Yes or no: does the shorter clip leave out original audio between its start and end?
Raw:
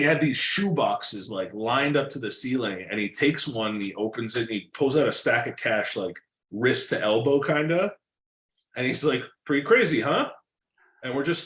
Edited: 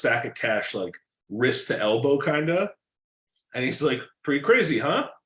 no